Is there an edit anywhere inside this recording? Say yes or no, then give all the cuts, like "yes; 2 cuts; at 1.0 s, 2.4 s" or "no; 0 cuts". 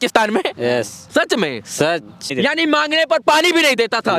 yes; 1 cut; at 2.3 s